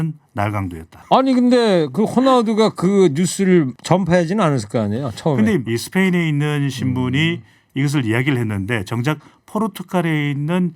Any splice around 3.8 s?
yes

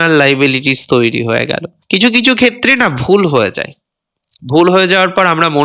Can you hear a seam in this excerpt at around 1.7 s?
yes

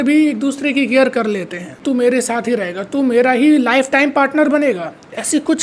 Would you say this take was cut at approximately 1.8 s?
yes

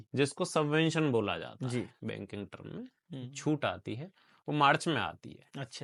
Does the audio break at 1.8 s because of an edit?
no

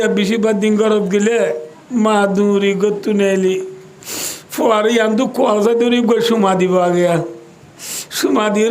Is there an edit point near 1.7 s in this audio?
yes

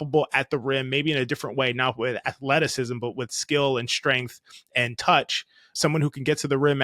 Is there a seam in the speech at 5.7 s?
yes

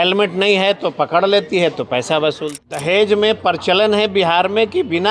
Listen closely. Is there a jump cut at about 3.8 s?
no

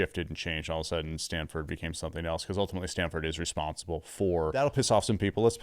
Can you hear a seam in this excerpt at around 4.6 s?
yes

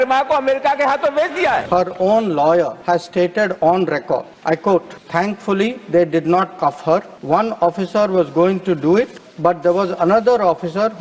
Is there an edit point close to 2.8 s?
yes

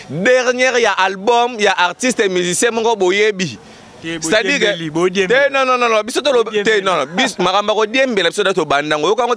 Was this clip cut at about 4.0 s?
no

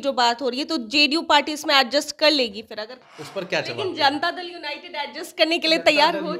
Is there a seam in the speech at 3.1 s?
yes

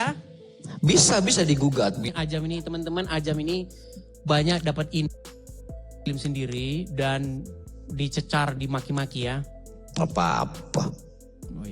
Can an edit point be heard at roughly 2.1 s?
yes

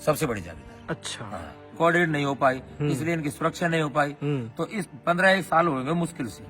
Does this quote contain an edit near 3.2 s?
no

